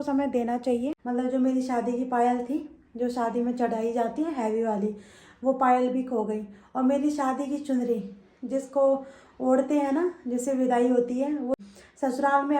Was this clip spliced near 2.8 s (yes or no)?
no